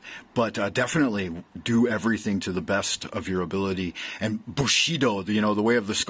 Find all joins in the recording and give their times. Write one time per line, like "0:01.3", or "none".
none